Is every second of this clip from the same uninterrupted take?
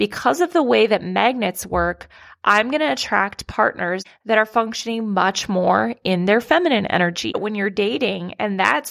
no; 2 cuts; at 4.1 s, 7.4 s

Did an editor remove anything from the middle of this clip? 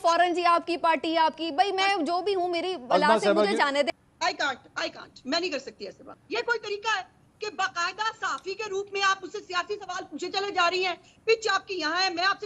yes; 2 cuts; at 3.9 s, 6.0 s

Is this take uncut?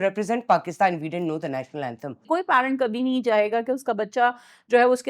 no; 1 cut; at 2.2 s

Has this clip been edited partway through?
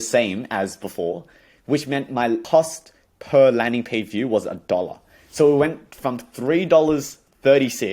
yes; 1 cut; at 2.4 s

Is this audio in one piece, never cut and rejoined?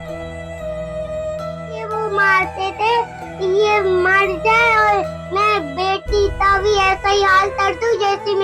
no; 1 cut; at 1.8 s

